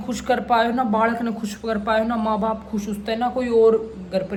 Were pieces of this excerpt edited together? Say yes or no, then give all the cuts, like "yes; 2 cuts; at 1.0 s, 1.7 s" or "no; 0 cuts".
no; 0 cuts